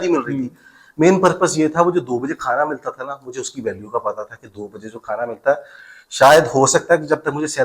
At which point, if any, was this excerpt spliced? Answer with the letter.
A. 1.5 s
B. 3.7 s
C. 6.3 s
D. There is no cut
D